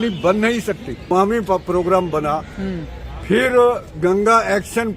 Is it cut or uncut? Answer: cut